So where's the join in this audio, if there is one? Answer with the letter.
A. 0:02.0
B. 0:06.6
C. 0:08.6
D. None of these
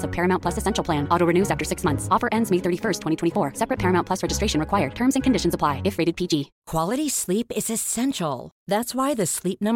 B